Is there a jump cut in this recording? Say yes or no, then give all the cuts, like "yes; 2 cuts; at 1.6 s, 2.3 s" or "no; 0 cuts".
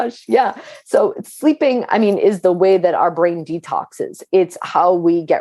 no; 0 cuts